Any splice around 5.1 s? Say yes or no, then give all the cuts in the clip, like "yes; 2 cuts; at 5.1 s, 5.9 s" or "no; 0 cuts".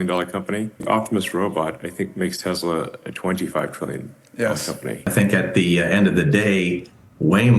yes; 1 cut; at 5.1 s